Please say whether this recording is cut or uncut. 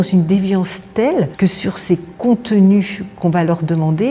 uncut